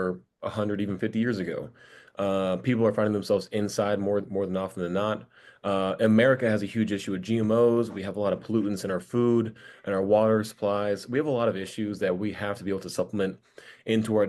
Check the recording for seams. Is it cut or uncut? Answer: uncut